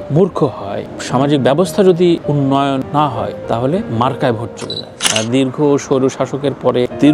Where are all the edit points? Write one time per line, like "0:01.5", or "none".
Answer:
0:05.0